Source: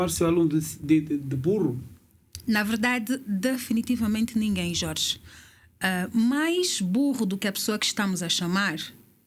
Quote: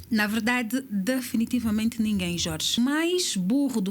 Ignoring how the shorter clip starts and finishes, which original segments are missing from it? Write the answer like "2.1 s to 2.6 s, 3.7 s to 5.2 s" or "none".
5.1 s to 6.2 s